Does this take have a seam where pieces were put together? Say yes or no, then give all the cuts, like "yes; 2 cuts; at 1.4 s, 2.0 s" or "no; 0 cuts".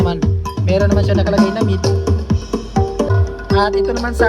yes; 1 cut; at 3.1 s